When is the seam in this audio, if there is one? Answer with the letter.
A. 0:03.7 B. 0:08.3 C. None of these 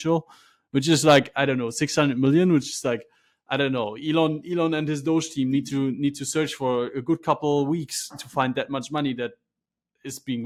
C